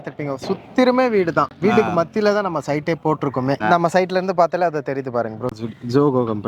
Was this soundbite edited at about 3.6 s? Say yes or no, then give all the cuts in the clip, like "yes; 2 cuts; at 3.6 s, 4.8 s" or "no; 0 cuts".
yes; 1 cut; at 3.6 s